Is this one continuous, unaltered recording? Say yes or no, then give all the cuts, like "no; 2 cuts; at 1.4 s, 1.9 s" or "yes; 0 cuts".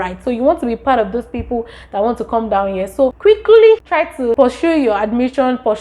no; 2 cuts; at 3.2 s, 4.2 s